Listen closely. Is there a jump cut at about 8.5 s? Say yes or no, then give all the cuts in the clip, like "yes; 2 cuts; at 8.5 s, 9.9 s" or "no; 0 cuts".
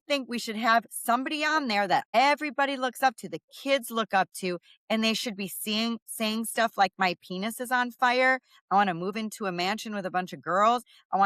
no; 1 cut; at 2.2 s